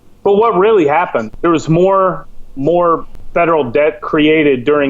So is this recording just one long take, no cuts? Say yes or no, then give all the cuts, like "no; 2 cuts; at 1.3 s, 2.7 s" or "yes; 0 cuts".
no; 2 cuts; at 1.3 s, 3.1 s